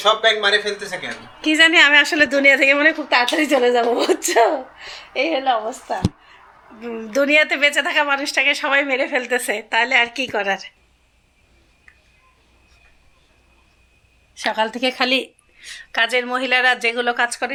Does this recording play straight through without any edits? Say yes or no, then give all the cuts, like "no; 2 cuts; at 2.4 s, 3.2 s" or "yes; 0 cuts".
yes; 0 cuts